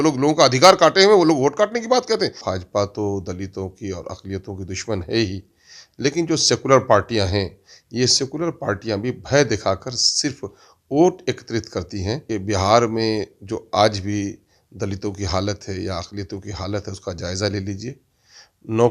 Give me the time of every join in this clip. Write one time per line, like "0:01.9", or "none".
0:02.4
0:12.2